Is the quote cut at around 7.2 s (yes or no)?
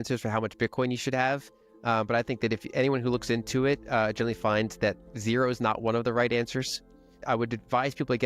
yes